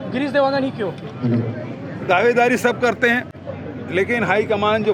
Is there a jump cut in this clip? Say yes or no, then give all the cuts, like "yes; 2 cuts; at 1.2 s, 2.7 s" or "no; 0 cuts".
no; 0 cuts